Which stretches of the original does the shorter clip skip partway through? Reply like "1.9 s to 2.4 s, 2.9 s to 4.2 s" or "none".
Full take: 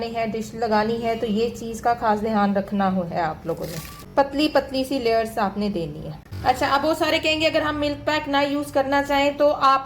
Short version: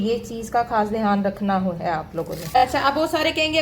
3.9 s to 6.4 s